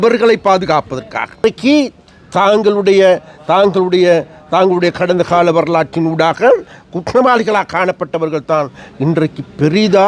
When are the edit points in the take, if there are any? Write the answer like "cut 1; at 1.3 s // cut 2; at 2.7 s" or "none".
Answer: cut 1; at 1.4 s